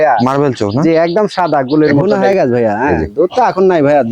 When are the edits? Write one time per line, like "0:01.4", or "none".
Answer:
0:02.0